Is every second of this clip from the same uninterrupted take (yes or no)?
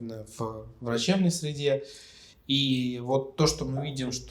yes